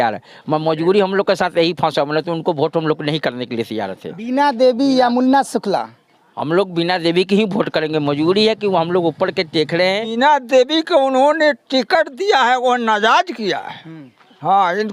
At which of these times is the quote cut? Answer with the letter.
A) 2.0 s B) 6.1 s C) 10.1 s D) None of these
C